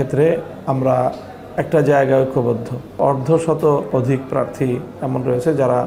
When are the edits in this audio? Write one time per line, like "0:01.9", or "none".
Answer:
none